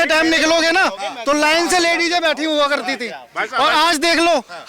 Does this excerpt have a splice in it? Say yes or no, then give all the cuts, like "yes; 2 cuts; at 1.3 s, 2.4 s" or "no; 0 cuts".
no; 0 cuts